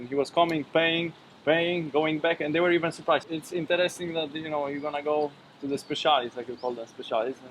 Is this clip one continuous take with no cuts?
no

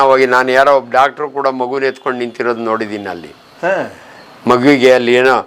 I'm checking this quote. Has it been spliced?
no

